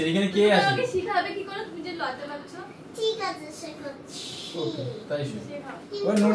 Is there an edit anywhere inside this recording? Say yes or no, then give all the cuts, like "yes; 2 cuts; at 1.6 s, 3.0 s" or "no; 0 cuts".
no; 0 cuts